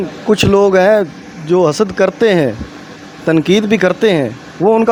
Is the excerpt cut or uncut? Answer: uncut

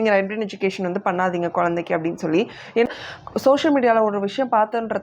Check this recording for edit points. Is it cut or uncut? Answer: cut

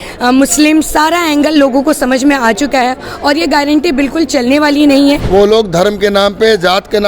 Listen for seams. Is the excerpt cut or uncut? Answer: cut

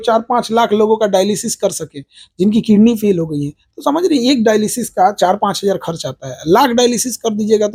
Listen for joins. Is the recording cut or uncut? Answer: uncut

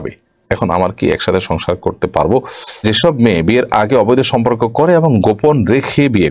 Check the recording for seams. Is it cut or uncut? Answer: cut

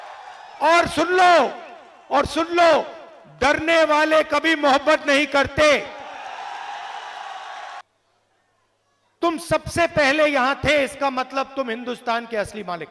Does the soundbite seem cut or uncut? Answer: cut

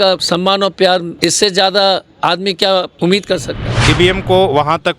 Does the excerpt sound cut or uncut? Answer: cut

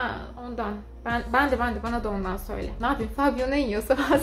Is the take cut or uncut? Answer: cut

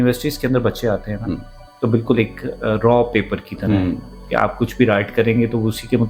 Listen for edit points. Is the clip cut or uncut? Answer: uncut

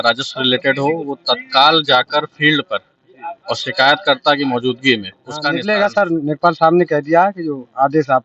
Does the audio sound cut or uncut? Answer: cut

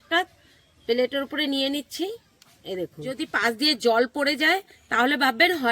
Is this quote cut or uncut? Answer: cut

